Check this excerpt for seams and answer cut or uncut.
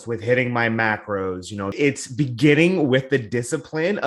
cut